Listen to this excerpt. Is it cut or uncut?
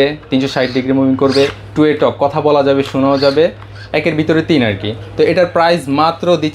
uncut